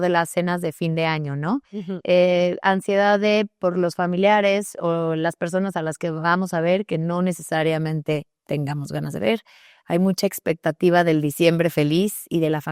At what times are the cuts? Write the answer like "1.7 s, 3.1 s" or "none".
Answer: none